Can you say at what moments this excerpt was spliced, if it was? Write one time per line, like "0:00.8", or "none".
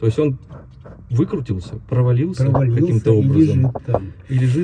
none